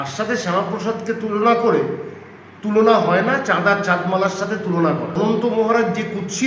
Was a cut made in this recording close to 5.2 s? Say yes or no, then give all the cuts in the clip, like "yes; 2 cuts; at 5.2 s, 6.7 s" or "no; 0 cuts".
yes; 1 cut; at 5.2 s